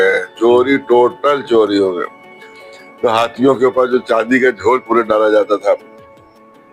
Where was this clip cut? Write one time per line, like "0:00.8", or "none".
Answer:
none